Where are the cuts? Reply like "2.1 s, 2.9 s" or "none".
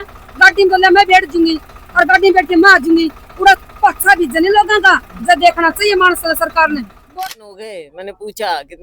7.1 s